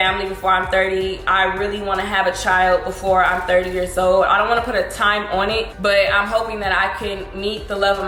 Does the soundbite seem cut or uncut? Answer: uncut